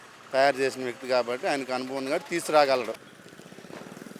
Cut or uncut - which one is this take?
cut